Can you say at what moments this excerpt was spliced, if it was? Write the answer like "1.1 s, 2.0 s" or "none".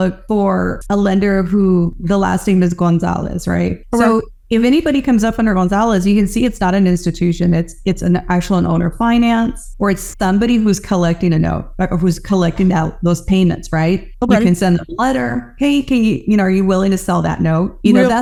none